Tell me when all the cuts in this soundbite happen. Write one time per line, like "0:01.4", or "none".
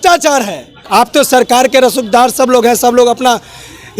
0:01.0